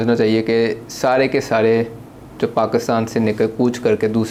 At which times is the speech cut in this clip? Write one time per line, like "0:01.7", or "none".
none